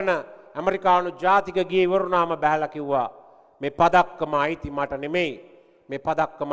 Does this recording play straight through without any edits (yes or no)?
yes